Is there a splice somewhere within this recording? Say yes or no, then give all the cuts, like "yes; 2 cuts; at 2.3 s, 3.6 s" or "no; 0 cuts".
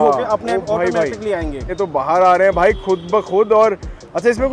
no; 0 cuts